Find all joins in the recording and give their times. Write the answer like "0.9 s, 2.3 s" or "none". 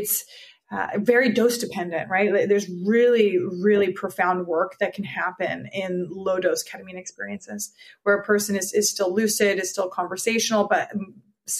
none